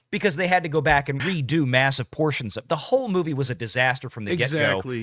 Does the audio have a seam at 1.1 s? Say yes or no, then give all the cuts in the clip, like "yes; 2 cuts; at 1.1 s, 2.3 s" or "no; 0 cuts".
yes; 1 cut; at 1.1 s